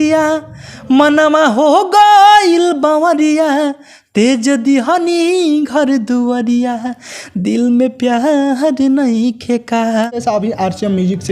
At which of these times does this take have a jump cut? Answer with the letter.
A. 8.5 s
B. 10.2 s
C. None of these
B